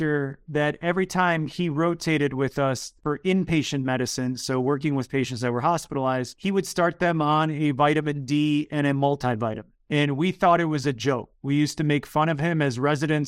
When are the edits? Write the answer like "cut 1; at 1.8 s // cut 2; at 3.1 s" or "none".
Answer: cut 1; at 2.9 s